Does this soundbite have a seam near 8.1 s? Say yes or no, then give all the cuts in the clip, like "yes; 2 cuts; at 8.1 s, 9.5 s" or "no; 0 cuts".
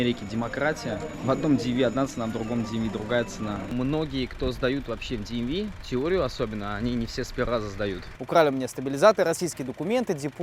yes; 3 cuts; at 1.1 s, 3.7 s, 8.1 s